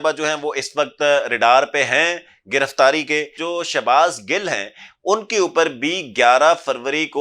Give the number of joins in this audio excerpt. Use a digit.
1